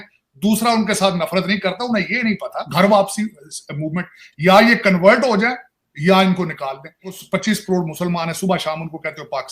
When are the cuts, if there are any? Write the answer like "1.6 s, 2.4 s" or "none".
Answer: 2.6 s, 7.1 s